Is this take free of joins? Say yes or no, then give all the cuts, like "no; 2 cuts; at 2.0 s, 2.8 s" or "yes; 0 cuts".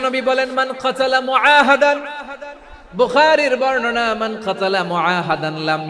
yes; 0 cuts